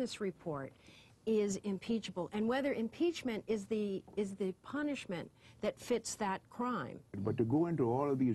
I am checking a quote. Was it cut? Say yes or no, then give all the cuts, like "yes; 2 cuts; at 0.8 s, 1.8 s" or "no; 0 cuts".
yes; 1 cut; at 7.2 s